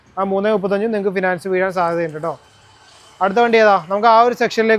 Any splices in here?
no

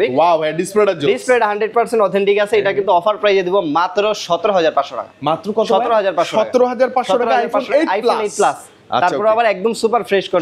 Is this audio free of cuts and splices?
yes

